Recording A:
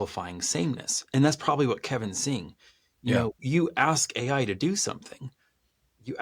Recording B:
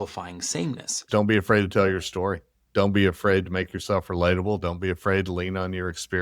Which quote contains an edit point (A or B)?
B